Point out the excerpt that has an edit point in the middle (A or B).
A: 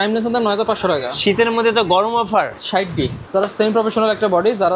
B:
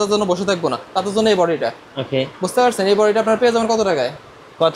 A